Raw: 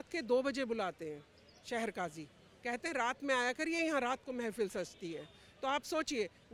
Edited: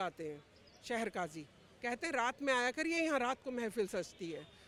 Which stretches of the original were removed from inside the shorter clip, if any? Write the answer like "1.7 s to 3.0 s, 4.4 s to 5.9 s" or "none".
none